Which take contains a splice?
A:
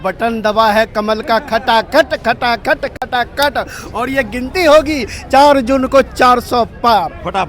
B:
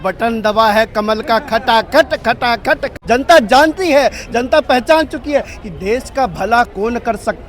B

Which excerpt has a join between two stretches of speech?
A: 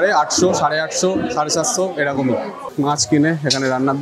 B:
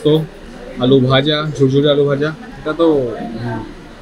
A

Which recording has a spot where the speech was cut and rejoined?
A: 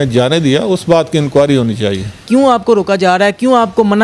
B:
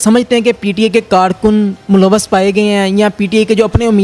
A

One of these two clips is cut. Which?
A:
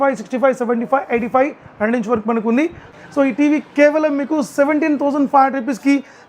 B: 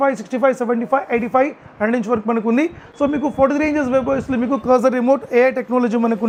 A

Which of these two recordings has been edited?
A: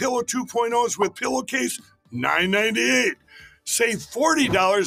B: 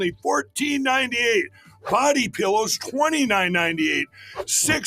B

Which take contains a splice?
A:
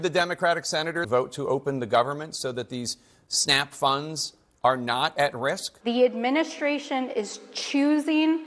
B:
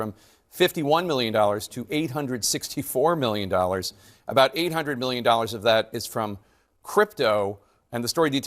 A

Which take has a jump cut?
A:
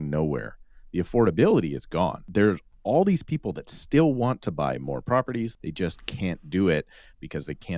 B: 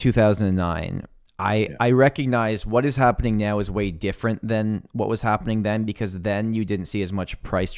A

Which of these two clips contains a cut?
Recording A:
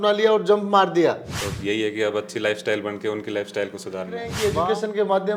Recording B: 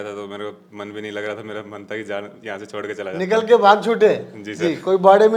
A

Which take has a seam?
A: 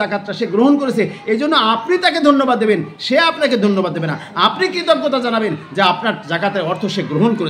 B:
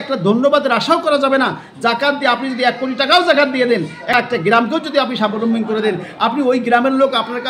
B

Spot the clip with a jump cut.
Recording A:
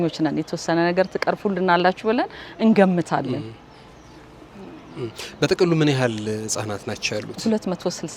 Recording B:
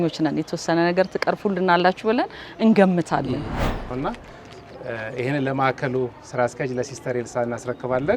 B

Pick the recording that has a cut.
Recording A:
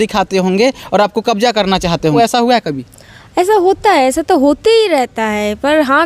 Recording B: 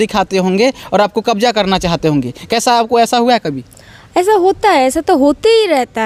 A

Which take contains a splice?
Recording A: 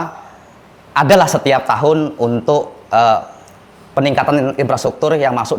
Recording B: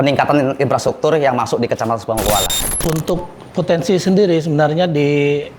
B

